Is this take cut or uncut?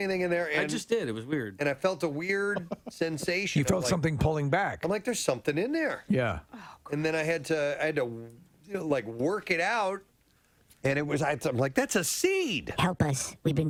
uncut